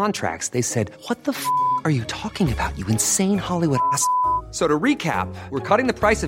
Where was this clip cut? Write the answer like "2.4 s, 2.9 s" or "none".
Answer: none

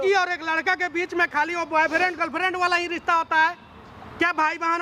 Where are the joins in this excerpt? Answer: none

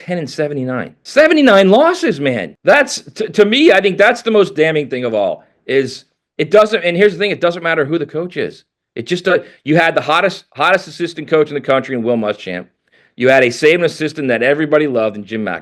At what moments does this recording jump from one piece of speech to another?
1.0 s, 2.5 s

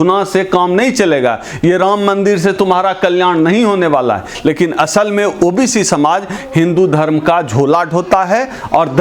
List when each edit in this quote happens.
4.3 s

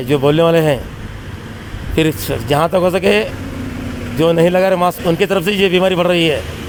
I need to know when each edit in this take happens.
none

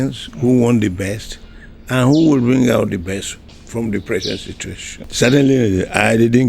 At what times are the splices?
5.0 s

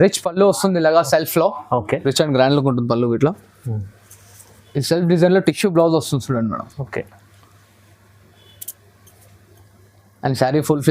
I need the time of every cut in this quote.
1.9 s

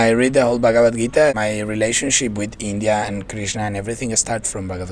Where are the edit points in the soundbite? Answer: 1.3 s

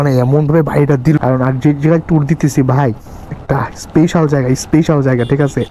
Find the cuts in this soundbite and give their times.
1.2 s

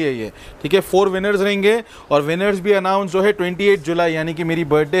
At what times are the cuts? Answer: none

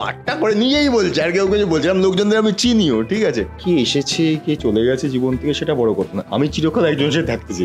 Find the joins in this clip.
3.6 s

